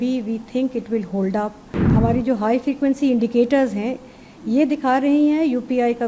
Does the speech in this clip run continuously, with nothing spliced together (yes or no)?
no